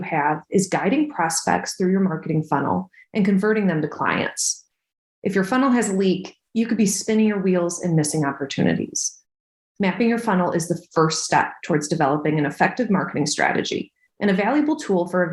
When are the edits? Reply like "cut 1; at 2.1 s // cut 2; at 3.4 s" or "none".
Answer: none